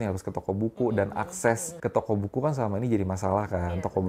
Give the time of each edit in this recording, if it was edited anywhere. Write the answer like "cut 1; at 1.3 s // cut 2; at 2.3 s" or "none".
cut 1; at 1.7 s